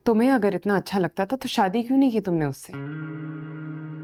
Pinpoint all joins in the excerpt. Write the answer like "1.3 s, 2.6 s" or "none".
none